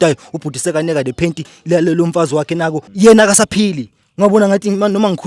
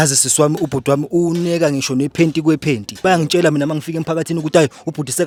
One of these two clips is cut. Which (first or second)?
first